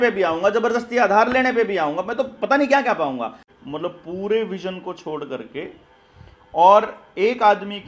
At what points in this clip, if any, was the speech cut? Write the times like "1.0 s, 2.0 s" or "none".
3.4 s